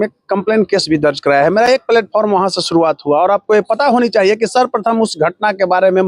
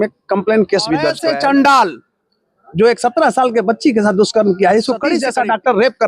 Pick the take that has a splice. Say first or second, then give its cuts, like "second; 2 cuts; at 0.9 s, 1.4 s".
second; 2 cuts; at 1.1 s, 5.2 s